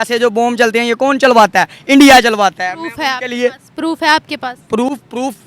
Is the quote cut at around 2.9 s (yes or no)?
no